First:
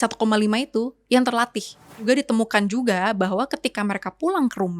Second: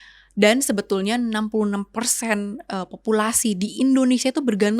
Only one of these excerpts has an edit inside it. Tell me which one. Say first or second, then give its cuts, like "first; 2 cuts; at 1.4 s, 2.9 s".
first; 1 cut; at 2.0 s